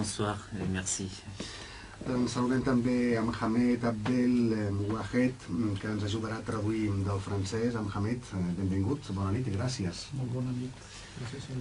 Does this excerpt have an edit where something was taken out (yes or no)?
yes